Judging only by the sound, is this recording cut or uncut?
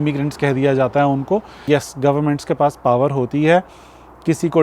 cut